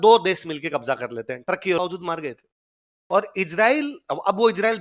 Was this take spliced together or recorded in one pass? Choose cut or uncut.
cut